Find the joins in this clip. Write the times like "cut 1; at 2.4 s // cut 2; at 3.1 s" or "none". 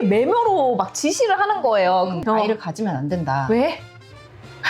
cut 1; at 2.2 s